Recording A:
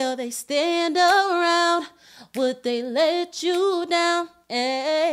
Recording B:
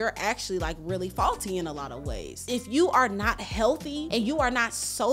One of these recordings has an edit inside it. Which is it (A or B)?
B